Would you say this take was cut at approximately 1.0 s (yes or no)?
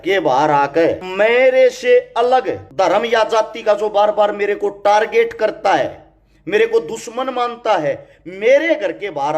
yes